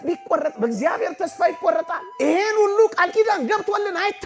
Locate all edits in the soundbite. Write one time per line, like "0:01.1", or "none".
0:02.0